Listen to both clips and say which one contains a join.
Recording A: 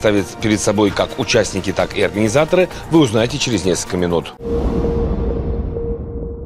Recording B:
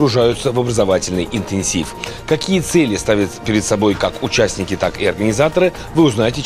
A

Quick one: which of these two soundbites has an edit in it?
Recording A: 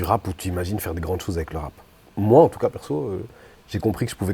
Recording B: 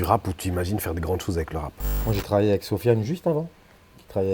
B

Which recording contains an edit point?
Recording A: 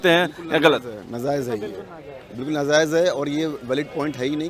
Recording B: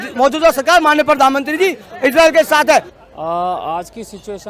B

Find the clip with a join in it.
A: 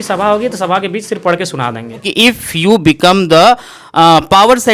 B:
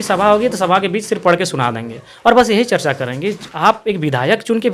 A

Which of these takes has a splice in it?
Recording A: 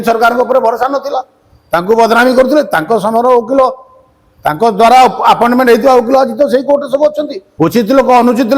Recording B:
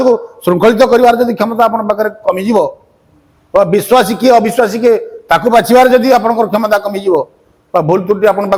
A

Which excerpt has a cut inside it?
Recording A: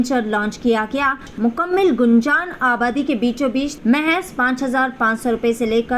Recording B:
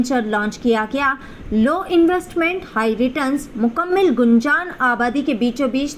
A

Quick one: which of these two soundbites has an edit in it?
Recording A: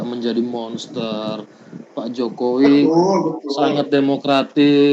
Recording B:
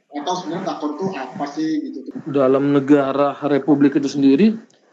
B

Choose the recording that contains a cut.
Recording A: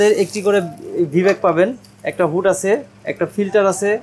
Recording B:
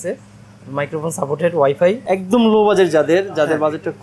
B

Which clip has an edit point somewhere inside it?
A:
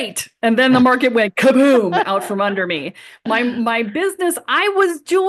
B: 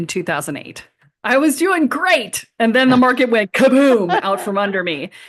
B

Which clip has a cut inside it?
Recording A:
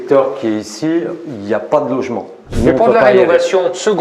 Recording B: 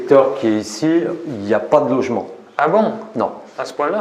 A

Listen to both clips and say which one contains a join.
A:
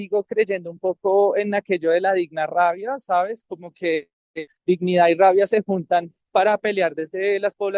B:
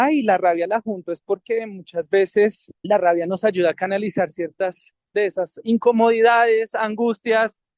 B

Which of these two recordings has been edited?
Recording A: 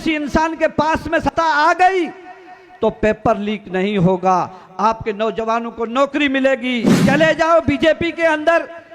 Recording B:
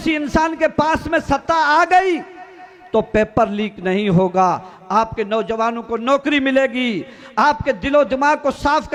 A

